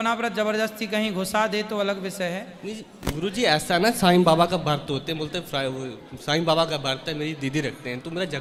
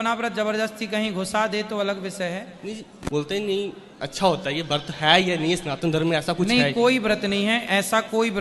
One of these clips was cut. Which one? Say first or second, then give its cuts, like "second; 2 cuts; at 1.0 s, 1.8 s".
second; 1 cut; at 2.9 s